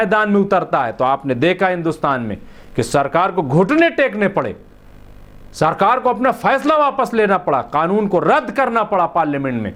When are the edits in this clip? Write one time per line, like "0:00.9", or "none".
none